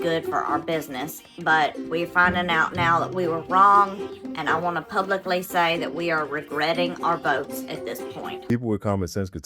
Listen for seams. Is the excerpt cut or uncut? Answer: cut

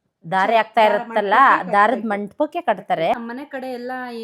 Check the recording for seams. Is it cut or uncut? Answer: cut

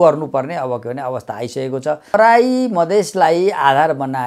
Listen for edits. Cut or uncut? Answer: cut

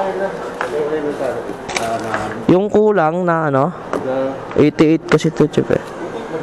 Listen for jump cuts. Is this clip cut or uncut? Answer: uncut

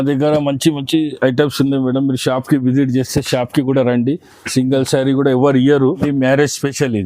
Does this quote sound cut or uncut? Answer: cut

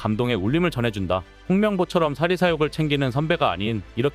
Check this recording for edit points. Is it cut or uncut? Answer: cut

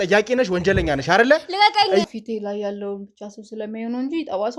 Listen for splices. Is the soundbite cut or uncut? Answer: cut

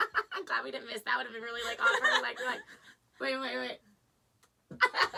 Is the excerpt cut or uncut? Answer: uncut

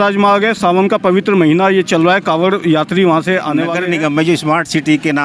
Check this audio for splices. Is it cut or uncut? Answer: cut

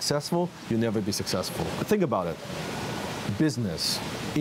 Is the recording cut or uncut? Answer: cut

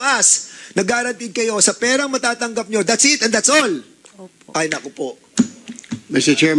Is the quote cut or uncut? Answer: uncut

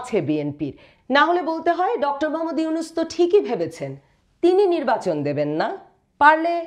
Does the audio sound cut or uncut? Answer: uncut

